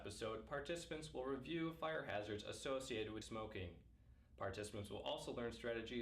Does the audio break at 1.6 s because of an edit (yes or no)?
no